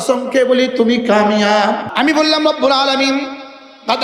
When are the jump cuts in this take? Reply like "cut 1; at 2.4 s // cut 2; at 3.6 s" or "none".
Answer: cut 1; at 1.9 s